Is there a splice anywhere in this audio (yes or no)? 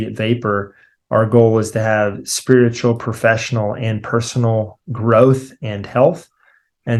no